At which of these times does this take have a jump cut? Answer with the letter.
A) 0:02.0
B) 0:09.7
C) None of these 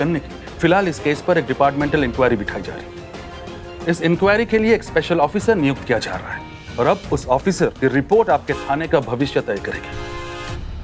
B